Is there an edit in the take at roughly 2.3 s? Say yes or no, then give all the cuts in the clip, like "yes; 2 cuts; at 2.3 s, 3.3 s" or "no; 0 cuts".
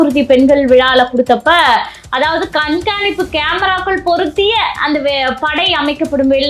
no; 0 cuts